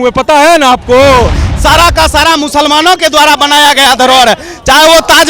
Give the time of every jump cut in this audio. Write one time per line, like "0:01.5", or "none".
0:01.4